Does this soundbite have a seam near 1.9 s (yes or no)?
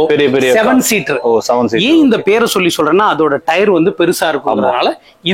no